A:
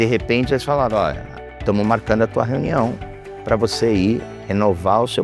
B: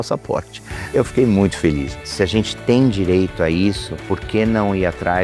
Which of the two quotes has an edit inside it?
B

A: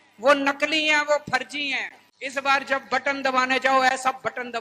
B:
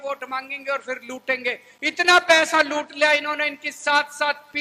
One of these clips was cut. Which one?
A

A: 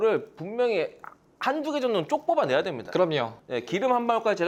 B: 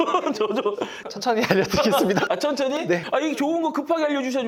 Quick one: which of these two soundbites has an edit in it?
B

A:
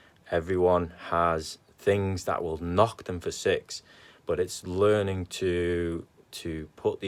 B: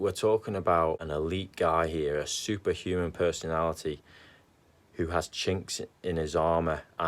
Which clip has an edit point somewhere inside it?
B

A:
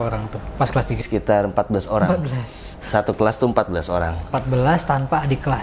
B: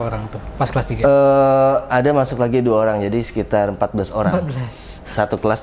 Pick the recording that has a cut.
A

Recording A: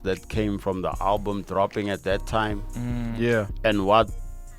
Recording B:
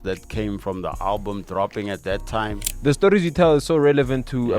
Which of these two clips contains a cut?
B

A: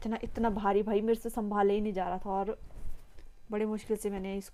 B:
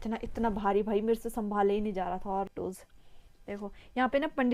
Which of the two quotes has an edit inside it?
B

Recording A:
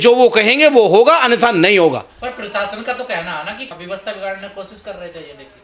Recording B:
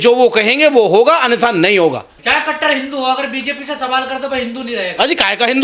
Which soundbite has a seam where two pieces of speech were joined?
B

